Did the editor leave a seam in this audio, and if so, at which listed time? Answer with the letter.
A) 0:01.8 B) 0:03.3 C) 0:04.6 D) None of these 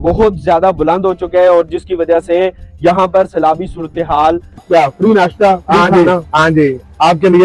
C